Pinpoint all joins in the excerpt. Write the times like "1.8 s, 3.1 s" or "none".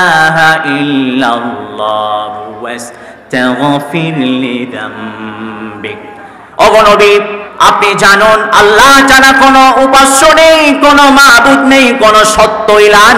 7.4 s